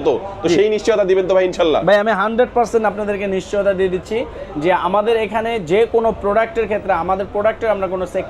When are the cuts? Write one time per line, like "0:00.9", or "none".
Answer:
none